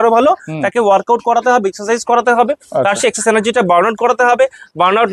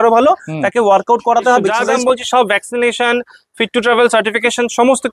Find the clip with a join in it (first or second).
second